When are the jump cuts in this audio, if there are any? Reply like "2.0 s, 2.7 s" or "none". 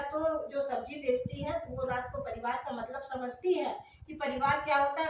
none